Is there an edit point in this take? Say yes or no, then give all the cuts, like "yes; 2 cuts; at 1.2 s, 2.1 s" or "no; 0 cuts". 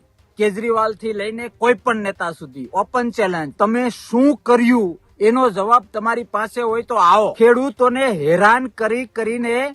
yes; 2 cuts; at 3.5 s, 7.3 s